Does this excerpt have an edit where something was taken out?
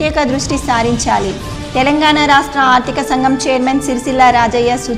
no; 0 cuts

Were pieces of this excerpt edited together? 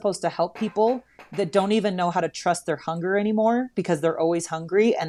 no; 0 cuts

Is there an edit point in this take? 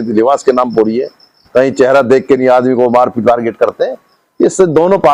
no; 0 cuts

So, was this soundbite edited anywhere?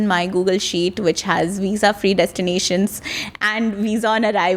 no; 0 cuts

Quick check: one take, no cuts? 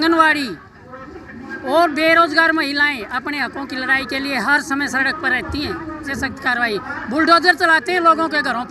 no; 1 cut; at 6.1 s

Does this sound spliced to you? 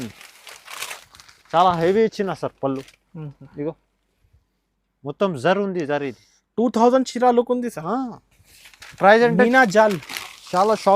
no; 0 cuts

